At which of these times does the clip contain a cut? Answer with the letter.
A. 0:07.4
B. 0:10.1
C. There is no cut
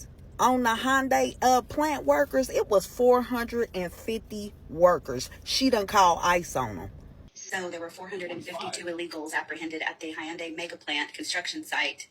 A